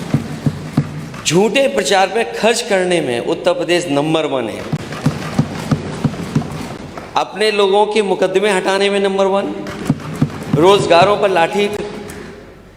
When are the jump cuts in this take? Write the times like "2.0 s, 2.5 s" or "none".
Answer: none